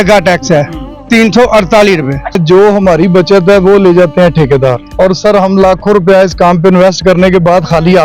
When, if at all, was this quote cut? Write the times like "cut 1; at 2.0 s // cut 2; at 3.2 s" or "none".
cut 1; at 2.4 s // cut 2; at 4.8 s